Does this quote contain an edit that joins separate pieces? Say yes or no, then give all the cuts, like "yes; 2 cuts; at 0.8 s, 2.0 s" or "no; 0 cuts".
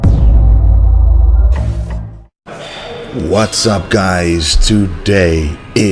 no; 0 cuts